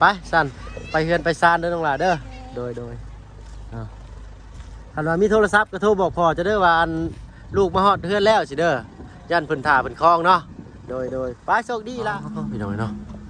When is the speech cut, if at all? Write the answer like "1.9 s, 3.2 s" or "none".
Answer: 12.1 s